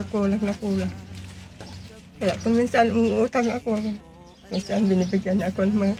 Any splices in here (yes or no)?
no